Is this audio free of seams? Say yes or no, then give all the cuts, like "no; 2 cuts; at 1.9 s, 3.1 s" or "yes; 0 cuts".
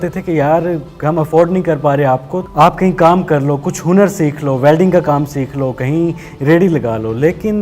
no; 1 cut; at 2.4 s